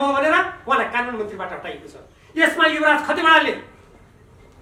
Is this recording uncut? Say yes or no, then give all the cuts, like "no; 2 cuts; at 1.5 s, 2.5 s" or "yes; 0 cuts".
yes; 0 cuts